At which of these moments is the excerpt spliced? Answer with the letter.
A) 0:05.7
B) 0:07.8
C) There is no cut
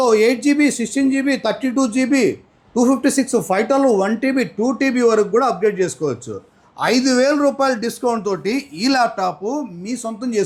C